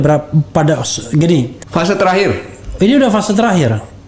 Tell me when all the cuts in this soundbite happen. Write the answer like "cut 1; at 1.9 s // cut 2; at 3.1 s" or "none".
cut 1; at 1.6 s